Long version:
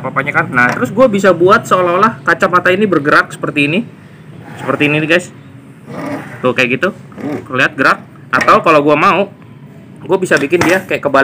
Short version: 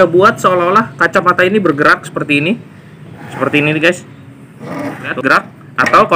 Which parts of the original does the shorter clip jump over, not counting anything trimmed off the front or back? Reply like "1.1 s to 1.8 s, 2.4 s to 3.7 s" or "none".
6.4 s to 7.7 s